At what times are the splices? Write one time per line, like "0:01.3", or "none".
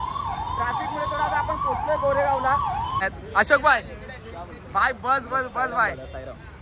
0:03.0